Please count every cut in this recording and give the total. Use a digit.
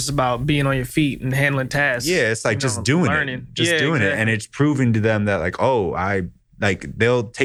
0